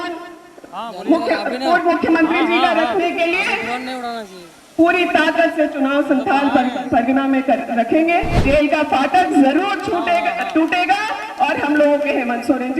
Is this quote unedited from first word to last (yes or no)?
no